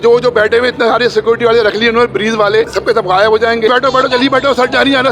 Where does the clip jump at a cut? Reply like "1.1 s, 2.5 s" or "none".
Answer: 2.6 s, 3.7 s